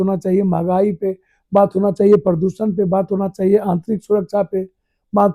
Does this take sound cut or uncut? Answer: uncut